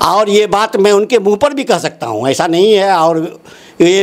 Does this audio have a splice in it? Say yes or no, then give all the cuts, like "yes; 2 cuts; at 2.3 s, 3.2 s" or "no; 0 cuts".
no; 0 cuts